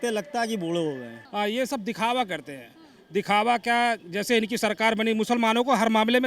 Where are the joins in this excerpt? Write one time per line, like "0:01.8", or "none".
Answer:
0:01.1